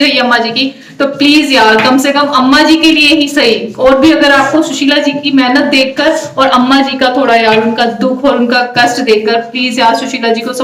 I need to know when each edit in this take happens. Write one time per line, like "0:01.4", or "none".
none